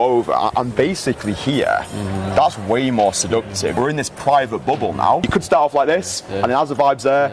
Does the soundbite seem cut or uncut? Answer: cut